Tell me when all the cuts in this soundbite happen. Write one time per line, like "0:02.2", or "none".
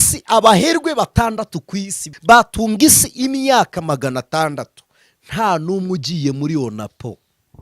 0:02.0